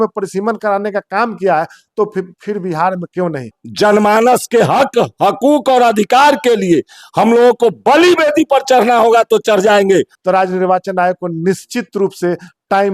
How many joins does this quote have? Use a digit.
2